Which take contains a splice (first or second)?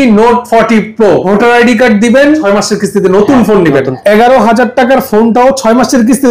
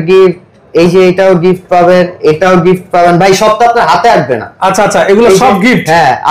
first